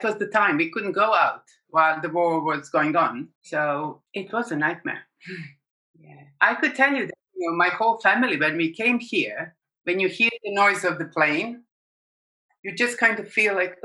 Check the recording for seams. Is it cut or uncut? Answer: cut